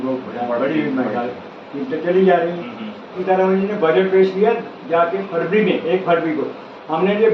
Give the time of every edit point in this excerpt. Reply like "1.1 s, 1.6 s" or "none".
3.2 s